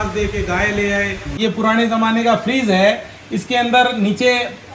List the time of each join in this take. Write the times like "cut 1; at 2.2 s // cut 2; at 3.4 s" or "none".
cut 1; at 1.3 s

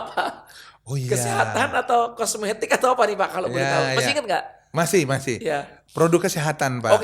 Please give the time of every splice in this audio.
none

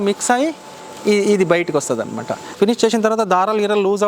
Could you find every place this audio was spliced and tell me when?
cut 1; at 2.5 s

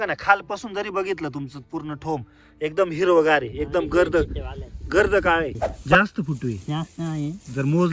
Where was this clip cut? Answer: cut 1; at 2.4 s // cut 2; at 5.9 s

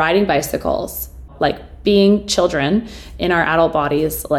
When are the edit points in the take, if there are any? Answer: cut 1; at 1.3 s

